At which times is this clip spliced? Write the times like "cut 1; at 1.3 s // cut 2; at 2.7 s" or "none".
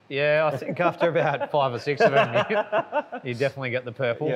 none